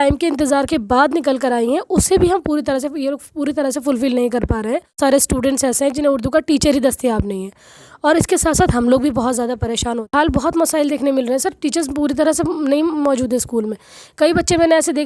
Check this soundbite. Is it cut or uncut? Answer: cut